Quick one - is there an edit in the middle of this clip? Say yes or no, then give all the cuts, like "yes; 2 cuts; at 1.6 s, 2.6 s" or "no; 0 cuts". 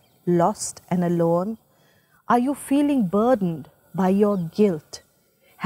no; 0 cuts